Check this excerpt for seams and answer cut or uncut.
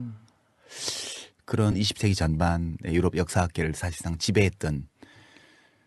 cut